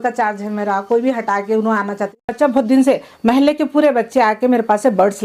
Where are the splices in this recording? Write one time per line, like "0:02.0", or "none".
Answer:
0:02.3